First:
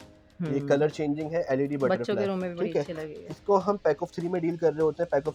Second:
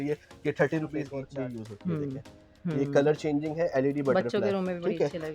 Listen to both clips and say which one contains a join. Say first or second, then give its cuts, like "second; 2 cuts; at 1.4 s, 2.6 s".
second; 1 cut; at 1.2 s